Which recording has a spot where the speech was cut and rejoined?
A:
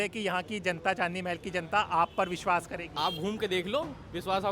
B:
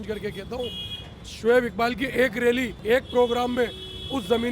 B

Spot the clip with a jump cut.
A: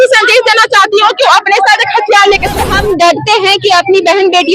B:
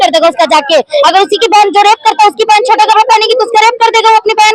A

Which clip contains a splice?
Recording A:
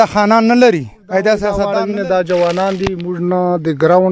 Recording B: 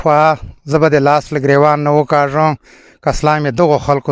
A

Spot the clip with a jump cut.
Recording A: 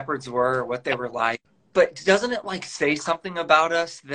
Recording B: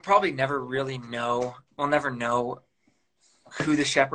A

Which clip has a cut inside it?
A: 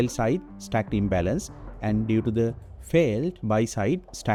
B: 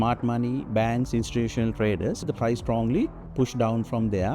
B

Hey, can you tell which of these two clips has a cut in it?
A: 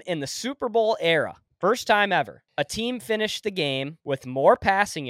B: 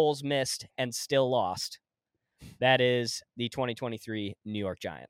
A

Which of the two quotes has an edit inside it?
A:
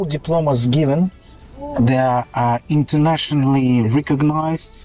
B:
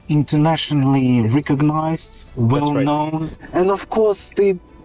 B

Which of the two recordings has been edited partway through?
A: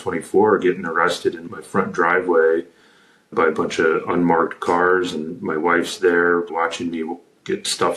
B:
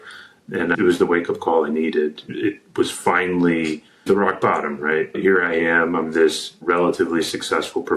B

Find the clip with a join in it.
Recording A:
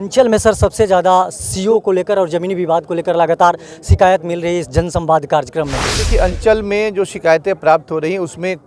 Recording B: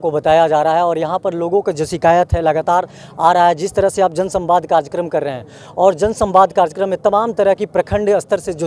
A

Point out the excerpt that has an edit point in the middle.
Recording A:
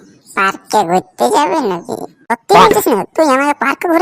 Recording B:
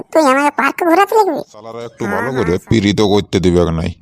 B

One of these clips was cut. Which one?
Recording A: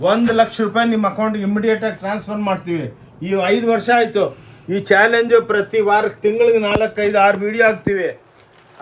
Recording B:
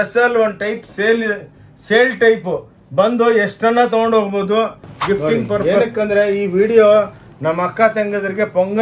B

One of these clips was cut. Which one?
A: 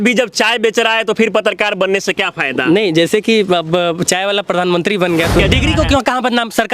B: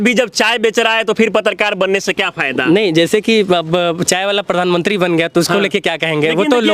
A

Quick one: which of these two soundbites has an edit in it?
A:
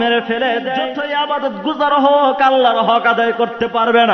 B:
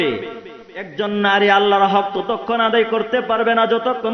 A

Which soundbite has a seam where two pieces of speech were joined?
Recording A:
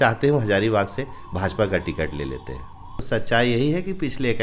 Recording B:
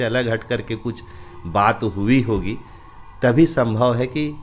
A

